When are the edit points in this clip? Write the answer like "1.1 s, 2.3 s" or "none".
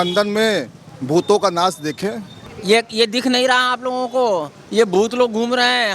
2.5 s